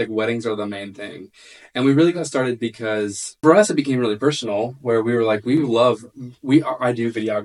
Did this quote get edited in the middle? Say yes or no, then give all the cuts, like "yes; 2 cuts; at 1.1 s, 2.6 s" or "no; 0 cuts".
yes; 1 cut; at 3.4 s